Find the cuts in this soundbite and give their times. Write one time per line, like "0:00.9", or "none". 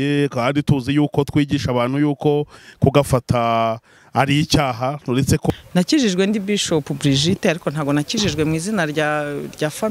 0:05.5